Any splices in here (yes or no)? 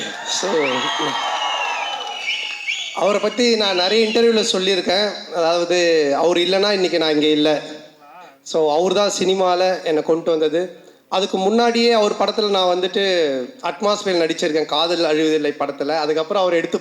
no